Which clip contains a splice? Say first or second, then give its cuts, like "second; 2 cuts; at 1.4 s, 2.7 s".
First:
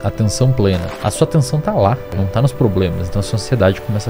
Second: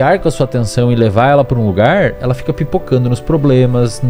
first; 2 cuts; at 0.8 s, 2.1 s